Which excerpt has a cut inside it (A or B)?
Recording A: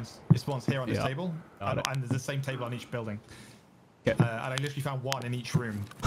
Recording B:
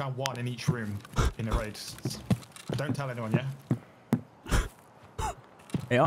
B